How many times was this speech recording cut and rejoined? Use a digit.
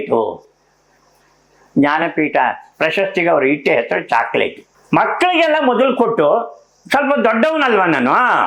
0